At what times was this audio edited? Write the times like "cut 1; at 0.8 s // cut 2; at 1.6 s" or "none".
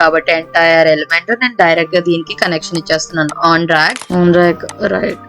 cut 1; at 4.0 s

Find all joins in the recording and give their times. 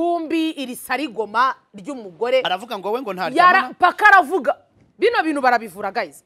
none

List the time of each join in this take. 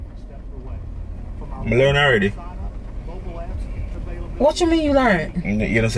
cut 1; at 3.9 s

